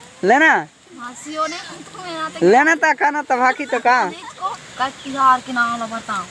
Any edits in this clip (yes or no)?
yes